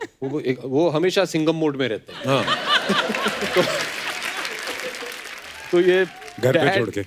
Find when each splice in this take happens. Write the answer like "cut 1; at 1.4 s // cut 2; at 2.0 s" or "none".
none